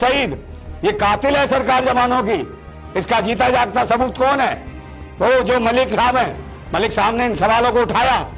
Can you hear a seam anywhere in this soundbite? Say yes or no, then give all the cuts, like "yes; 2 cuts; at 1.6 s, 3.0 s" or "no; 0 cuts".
no; 0 cuts